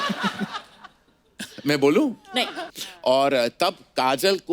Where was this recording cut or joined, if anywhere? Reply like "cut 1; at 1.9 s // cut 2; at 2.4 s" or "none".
cut 1; at 2.6 s